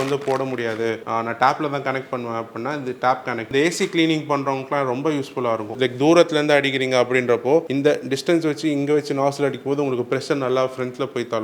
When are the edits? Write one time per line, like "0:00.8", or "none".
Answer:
0:01.0
0:03.5
0:05.7
0:07.7